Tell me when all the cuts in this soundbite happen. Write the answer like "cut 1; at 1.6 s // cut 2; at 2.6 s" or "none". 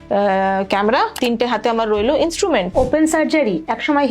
cut 1; at 1.2 s // cut 2; at 2.7 s